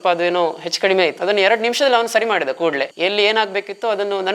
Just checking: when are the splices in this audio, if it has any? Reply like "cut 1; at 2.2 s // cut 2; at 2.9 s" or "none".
cut 1; at 1.2 s // cut 2; at 2.9 s